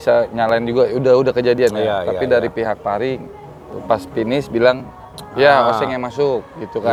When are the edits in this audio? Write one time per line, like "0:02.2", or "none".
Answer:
none